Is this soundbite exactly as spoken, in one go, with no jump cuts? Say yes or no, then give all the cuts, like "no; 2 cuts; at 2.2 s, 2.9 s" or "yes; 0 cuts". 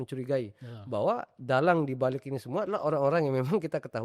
yes; 0 cuts